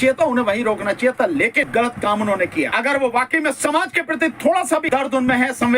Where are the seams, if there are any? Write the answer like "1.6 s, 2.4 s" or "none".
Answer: 1.7 s, 2.7 s, 4.9 s